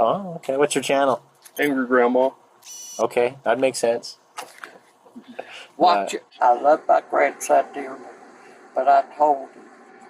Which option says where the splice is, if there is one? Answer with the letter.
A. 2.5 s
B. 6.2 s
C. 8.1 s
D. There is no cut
B